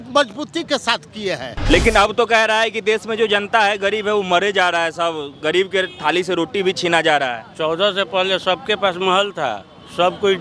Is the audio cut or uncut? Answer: cut